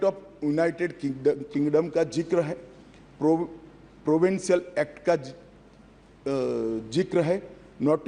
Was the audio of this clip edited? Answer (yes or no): no